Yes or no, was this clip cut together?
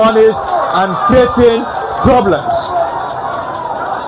no